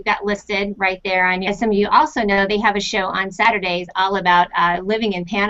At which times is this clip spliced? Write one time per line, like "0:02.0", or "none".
none